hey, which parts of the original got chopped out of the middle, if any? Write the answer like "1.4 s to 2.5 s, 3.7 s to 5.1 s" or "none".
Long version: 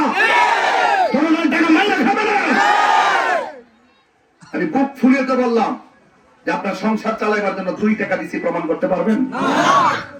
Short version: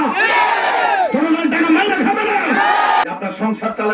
3.0 s to 6.5 s